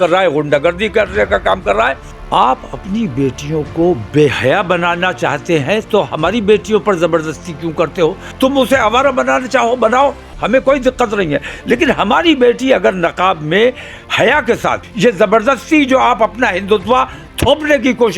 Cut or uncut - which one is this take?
cut